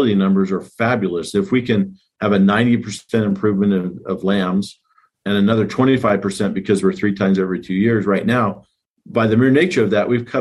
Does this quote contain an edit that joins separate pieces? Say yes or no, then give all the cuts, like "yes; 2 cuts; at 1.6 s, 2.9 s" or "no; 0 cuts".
no; 0 cuts